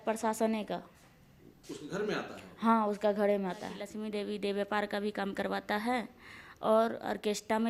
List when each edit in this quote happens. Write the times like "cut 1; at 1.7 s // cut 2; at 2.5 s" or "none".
cut 1; at 3.9 s